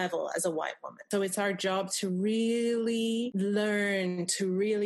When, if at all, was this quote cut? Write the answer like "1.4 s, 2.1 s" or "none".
1.1 s, 3.3 s